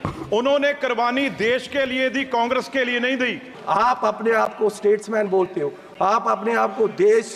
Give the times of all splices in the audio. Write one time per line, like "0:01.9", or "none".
0:03.5